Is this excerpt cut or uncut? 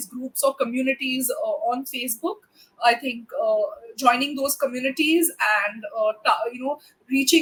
uncut